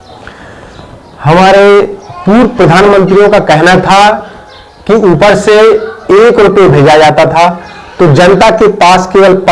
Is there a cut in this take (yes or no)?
no